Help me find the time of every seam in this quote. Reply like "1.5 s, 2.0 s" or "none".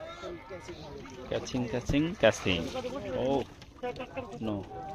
none

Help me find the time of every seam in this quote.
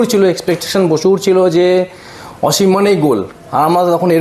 none

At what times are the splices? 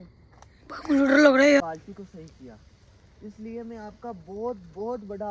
1.6 s

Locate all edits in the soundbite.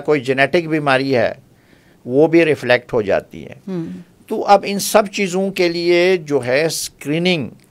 none

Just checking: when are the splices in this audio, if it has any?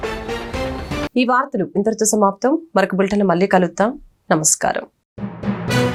none

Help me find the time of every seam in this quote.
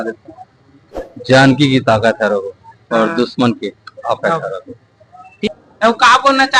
5.5 s

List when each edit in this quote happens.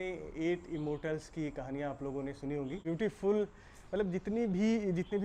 2.8 s

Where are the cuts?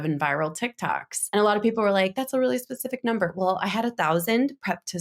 1.1 s

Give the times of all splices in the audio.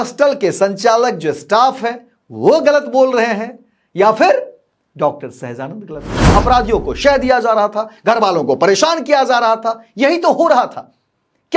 6.2 s

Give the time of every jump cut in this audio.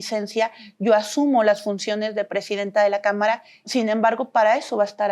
3.5 s

